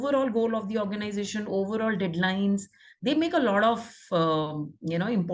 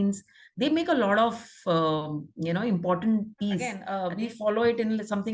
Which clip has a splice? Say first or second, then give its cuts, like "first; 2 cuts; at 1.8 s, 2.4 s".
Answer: second; 1 cut; at 3.9 s